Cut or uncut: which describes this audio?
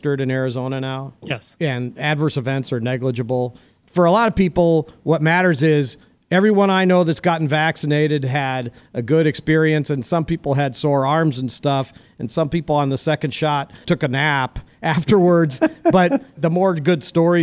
cut